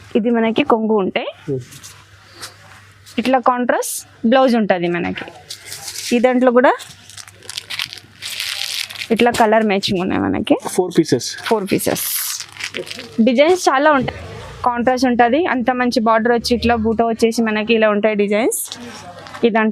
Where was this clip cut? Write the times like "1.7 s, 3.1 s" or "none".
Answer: 14.1 s